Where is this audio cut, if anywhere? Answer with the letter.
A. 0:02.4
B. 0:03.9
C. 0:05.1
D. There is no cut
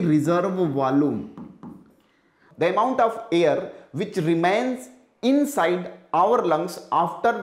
A